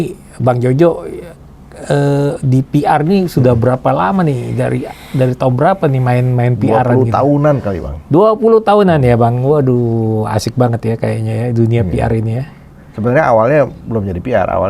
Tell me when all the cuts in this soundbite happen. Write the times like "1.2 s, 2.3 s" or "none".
none